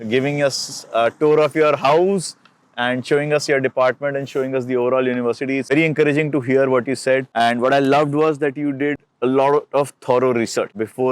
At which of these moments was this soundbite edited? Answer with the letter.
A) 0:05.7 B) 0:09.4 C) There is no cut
A